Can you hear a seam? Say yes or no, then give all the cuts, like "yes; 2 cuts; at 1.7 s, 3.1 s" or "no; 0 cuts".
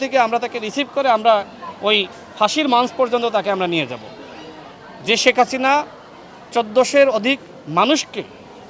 no; 0 cuts